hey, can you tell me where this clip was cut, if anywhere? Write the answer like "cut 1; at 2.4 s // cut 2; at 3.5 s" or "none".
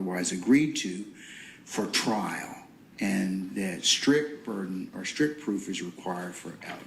cut 1; at 3.7 s

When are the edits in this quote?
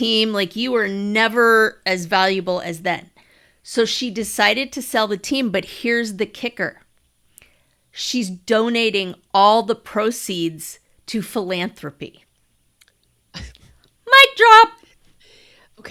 none

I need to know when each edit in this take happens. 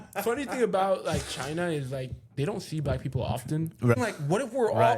cut 1; at 3.9 s

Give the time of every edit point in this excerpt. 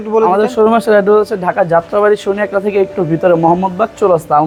none

